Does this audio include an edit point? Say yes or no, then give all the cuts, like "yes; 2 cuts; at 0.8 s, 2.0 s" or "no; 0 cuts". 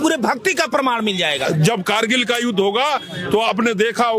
yes; 1 cut; at 1.5 s